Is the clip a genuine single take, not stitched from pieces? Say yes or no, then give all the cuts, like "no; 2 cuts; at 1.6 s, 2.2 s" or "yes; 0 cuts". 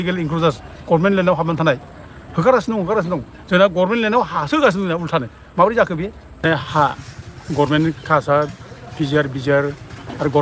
no; 1 cut; at 6.4 s